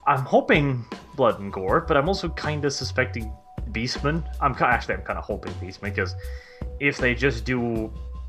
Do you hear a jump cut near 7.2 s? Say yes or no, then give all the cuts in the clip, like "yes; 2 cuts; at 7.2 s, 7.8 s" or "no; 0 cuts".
yes; 1 cut; at 7.2 s